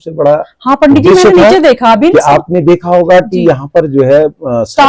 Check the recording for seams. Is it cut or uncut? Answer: uncut